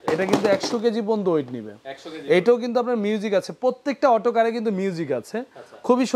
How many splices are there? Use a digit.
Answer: 0